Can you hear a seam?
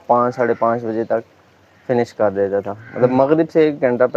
no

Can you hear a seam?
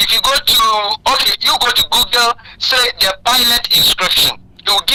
no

